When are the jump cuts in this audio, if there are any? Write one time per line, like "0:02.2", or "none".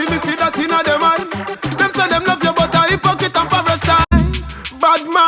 0:04.1